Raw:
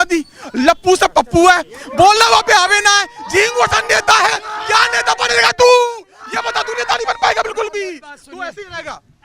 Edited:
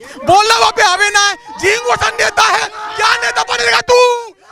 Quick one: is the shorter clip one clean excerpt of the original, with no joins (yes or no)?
yes